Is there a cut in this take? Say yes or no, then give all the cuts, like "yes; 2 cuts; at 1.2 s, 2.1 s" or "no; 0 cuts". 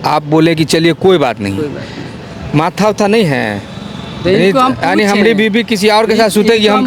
no; 0 cuts